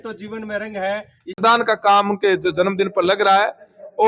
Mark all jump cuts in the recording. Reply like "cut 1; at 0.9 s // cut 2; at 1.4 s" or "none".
cut 1; at 1.4 s